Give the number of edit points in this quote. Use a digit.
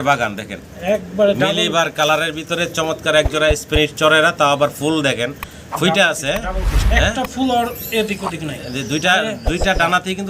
0